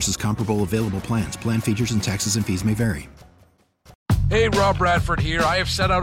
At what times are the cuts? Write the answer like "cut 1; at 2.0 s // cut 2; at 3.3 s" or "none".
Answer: cut 1; at 3.9 s

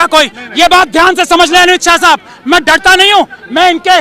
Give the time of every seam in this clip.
none

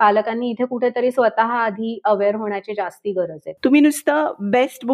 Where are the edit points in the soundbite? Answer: cut 1; at 3.4 s

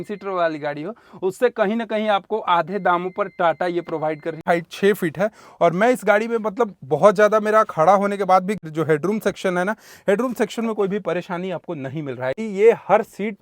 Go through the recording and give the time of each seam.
cut 1; at 4.4 s // cut 2; at 8.6 s // cut 3; at 12.5 s

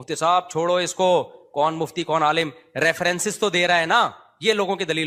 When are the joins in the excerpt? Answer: none

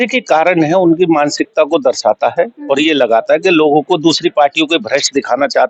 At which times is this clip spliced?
none

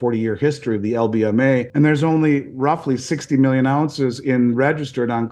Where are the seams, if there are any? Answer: cut 1; at 1.7 s

